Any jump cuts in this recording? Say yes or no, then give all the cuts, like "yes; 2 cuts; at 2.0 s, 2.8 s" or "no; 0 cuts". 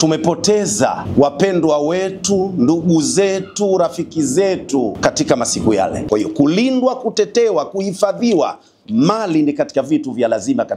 yes; 3 cuts; at 1.0 s, 5.0 s, 6.0 s